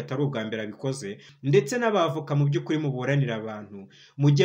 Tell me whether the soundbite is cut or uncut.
cut